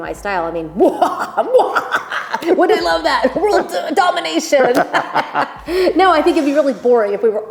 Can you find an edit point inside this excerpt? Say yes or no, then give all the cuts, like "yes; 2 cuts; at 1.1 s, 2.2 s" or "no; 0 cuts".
no; 0 cuts